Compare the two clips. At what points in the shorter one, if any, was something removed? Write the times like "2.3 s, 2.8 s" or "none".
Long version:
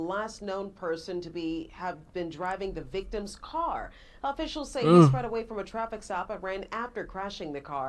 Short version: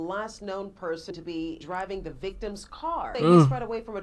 1.6 s, 3.1 s